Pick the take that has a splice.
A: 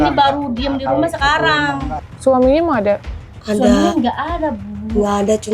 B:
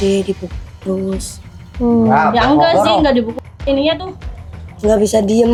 A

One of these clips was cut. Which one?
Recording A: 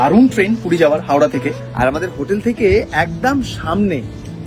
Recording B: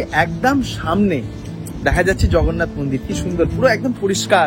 A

